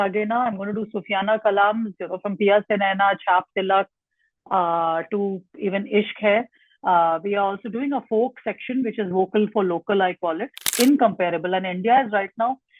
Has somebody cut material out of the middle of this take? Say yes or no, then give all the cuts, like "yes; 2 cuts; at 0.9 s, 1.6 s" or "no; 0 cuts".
yes; 1 cut; at 10.6 s